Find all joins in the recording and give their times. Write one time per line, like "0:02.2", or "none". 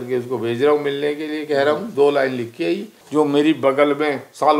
0:02.9